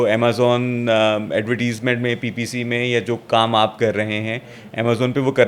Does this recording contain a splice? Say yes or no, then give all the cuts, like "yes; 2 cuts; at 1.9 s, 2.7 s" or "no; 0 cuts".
no; 0 cuts